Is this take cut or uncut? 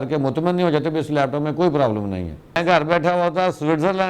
cut